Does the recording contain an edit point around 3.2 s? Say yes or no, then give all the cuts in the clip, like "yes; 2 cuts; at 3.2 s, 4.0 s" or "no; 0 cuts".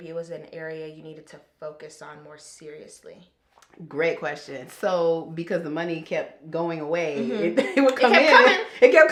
no; 0 cuts